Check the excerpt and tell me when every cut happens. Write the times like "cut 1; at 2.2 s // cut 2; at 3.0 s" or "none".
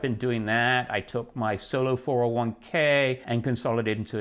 cut 1; at 3.2 s